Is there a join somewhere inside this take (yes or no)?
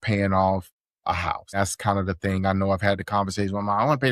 no